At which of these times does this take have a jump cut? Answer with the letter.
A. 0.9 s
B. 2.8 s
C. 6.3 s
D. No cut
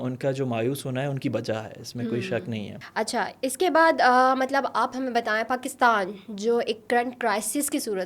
D